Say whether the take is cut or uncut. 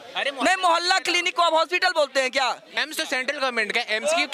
cut